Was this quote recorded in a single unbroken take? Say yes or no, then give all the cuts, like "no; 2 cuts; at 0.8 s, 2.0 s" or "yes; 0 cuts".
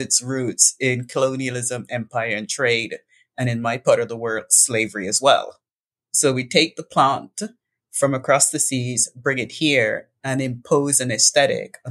yes; 0 cuts